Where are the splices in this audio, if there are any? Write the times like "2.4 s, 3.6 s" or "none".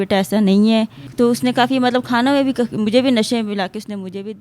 1.0 s